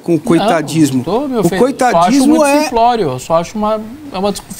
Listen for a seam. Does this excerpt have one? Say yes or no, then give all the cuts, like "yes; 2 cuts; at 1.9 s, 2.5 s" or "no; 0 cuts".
no; 0 cuts